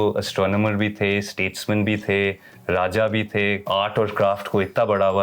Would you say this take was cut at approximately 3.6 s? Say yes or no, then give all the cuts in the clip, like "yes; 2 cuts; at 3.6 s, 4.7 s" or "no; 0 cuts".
yes; 1 cut; at 3.6 s